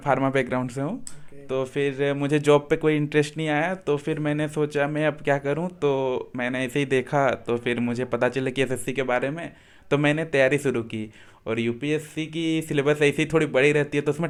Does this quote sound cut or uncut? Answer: uncut